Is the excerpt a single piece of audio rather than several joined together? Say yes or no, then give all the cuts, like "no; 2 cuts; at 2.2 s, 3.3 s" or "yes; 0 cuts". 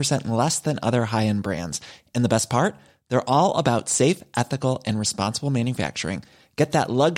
yes; 0 cuts